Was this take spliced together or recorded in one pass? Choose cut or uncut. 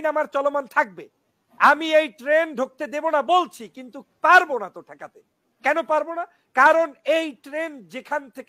uncut